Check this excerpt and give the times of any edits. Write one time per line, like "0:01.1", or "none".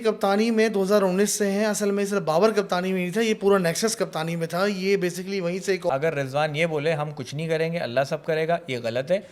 0:05.9